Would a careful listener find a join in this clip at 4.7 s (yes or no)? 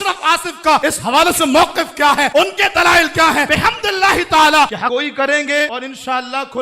yes